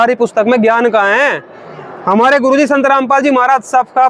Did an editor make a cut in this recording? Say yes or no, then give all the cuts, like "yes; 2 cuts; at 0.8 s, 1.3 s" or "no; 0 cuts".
no; 0 cuts